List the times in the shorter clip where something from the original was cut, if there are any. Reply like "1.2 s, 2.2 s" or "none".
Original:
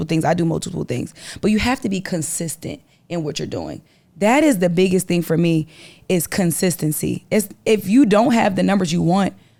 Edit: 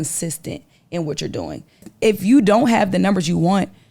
1.9 s